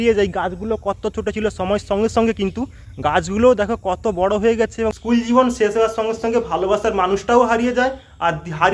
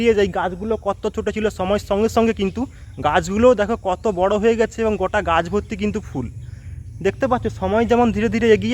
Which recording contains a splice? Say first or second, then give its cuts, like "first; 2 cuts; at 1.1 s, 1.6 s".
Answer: first; 1 cut; at 4.9 s